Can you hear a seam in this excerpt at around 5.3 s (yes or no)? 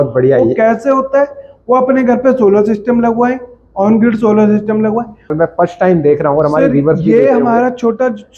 yes